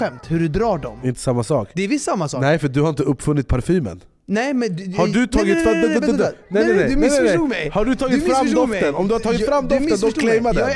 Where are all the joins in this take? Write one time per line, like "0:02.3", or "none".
0:00.9